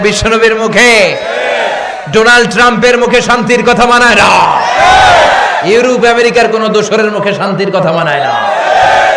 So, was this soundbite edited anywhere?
no; 0 cuts

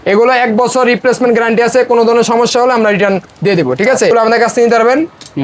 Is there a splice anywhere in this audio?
yes; 1 cut; at 4.1 s

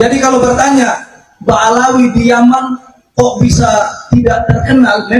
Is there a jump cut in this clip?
no; 0 cuts

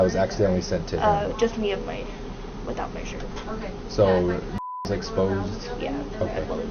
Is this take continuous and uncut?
yes; 0 cuts

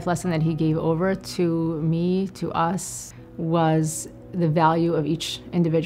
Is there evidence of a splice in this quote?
no; 0 cuts

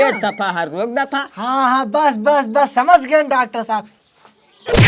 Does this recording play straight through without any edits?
no; 1 cut; at 3.9 s

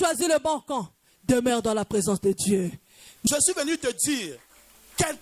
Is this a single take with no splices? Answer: no; 1 cut; at 3.3 s

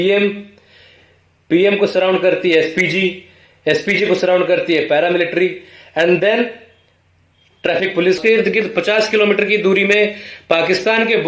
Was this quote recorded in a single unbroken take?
no; 1 cut; at 8.2 s

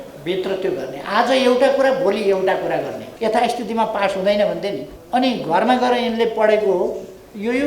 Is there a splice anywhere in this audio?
yes; 2 cuts; at 3.1 s, 4.9 s

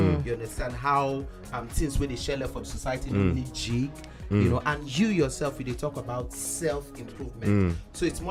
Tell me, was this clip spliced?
no; 0 cuts

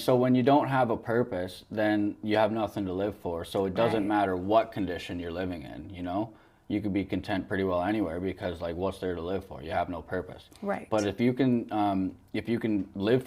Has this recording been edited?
no; 0 cuts

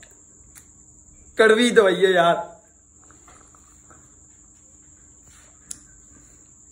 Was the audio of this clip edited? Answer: no; 0 cuts

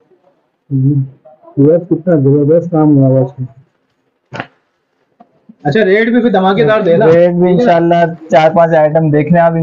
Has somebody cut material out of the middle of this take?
no; 0 cuts

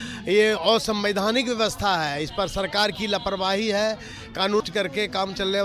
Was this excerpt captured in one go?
no; 1 cut; at 4.6 s

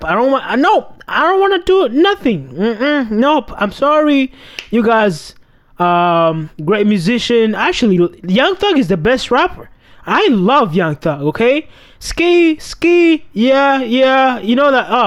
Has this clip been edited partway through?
no; 0 cuts

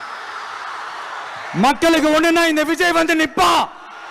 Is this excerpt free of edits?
yes; 0 cuts

